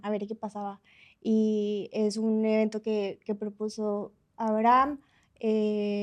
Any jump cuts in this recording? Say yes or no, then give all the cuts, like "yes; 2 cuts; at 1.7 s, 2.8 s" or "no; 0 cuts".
no; 0 cuts